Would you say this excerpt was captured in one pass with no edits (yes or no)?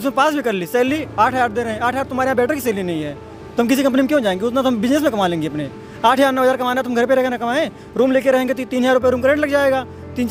yes